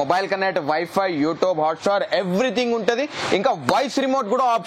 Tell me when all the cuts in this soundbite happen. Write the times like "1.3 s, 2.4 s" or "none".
none